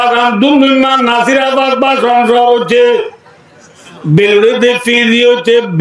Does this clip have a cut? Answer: no; 0 cuts

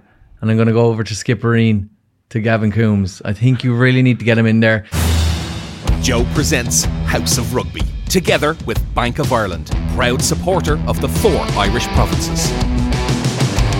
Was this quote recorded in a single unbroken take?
no; 1 cut; at 4.9 s

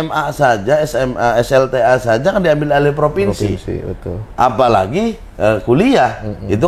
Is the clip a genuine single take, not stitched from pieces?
yes; 0 cuts

